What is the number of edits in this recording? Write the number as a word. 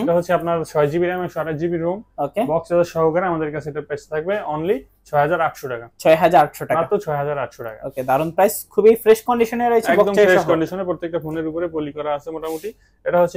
zero